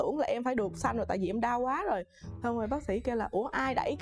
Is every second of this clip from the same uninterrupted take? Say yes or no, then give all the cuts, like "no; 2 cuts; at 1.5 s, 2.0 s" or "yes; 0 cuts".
yes; 0 cuts